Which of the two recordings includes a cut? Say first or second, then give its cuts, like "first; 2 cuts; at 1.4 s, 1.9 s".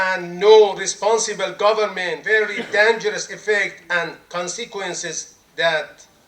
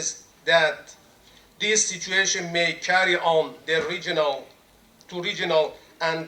first; 1 cut; at 2.2 s